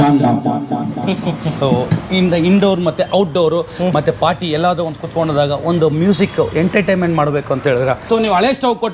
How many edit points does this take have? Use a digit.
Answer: 1